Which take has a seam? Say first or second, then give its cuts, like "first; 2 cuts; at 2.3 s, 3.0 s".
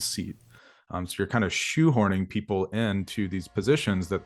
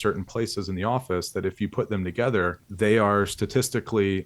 second; 1 cut; at 2.6 s